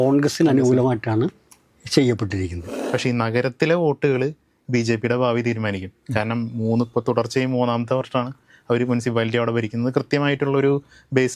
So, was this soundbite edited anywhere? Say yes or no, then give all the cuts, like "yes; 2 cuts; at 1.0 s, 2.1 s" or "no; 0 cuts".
yes; 1 cut; at 2.8 s